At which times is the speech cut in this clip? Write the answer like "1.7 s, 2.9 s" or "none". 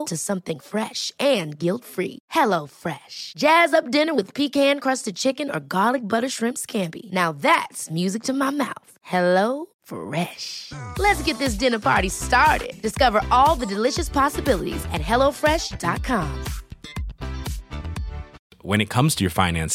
none